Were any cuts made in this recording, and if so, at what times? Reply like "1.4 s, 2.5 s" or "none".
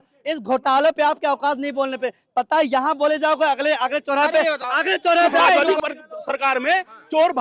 5.6 s